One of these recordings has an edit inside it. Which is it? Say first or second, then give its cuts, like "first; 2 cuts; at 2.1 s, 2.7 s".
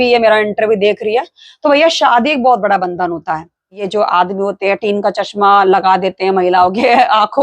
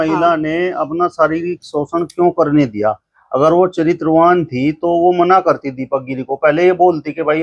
first; 1 cut; at 3.8 s